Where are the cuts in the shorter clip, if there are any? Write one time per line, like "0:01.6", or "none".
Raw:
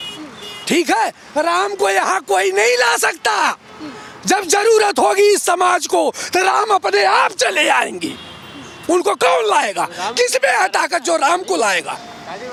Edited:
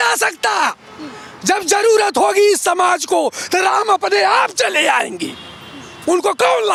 none

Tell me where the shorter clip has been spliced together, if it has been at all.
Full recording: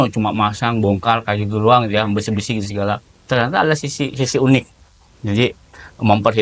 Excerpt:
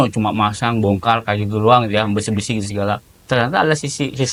none

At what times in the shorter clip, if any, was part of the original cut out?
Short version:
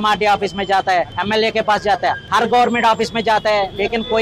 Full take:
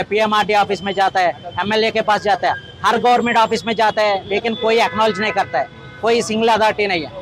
0:01.1
0:02.2

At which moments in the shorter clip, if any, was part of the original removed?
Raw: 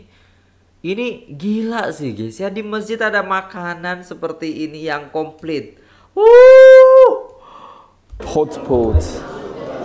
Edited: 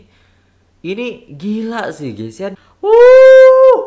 0:02.6

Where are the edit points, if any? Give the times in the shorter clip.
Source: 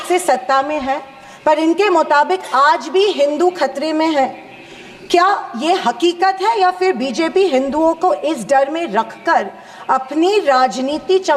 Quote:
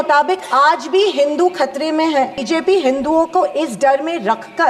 0:02.4

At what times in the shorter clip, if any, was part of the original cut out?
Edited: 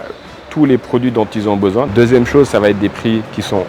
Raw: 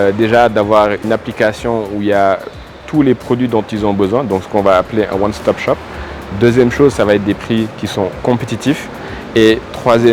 0:01.9

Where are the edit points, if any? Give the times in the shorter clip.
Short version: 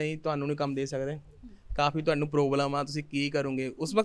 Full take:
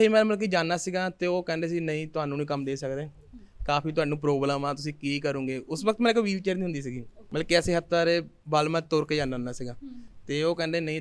none

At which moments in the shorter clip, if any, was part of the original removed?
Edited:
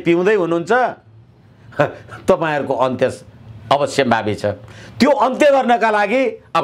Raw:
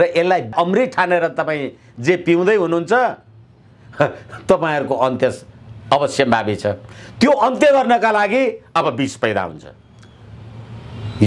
none

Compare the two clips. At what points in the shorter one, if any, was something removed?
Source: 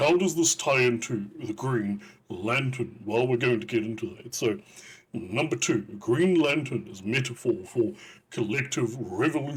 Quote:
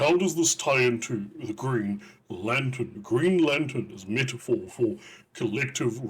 0:03.0

